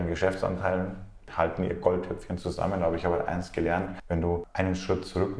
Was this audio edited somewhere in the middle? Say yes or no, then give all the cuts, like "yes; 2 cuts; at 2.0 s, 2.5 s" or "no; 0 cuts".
yes; 2 cuts; at 1.3 s, 4.4 s